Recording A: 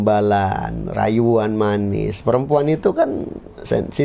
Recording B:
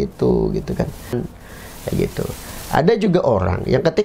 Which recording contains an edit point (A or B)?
B